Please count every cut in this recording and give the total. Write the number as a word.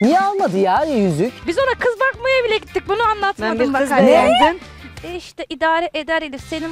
two